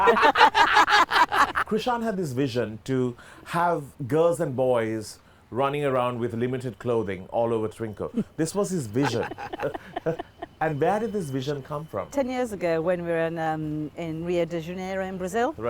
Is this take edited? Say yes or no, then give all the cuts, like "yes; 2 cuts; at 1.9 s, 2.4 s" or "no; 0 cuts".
yes; 3 cuts; at 1.7 s, 3.9 s, 12.1 s